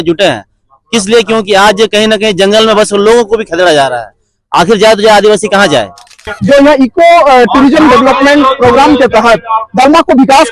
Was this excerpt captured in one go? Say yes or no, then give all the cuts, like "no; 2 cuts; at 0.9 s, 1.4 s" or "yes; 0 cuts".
no; 1 cut; at 6.3 s